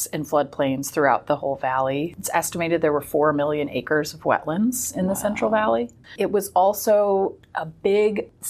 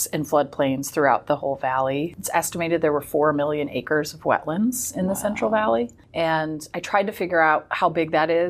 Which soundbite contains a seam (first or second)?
first